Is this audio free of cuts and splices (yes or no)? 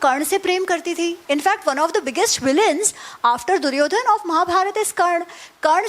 no